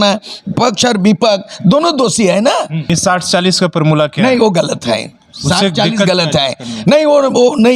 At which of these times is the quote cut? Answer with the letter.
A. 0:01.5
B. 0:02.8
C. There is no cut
B